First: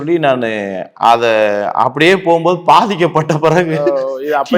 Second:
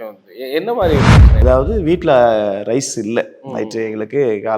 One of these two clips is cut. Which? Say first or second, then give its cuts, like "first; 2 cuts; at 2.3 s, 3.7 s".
second; 1 cut; at 1.4 s